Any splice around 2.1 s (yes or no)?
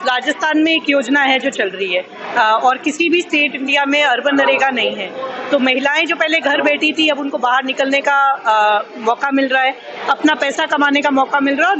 no